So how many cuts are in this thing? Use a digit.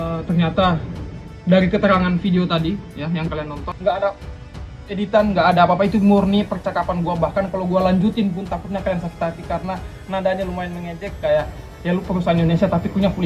0